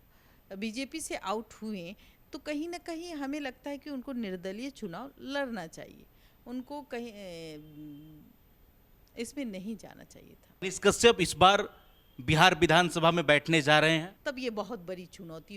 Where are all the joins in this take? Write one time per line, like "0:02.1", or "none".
0:10.6
0:14.2

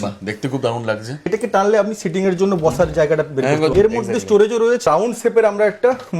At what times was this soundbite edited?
0:01.3
0:03.7
0:04.9

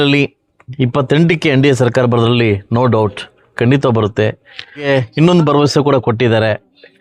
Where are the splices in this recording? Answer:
0:04.8

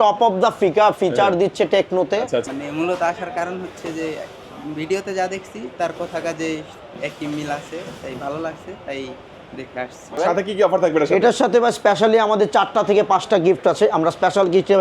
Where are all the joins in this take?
0:02.5
0:10.2

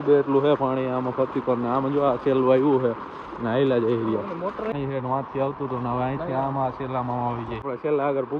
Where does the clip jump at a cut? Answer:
none

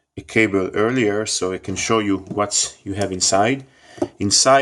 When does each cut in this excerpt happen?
0:02.1

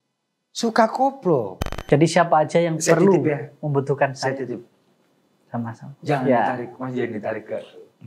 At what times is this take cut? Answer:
0:01.7

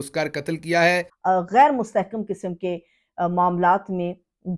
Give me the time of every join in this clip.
0:01.1

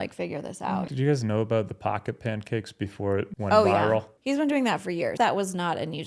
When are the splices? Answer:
0:00.9
0:03.3
0:04.1
0:05.1

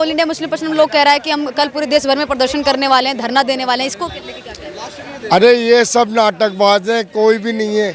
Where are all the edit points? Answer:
none

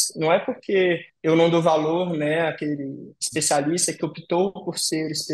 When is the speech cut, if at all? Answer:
0:01.1

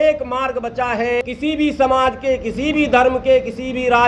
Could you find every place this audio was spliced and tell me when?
0:01.2

